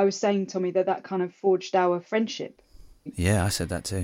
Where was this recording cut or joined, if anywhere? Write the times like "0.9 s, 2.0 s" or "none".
3.1 s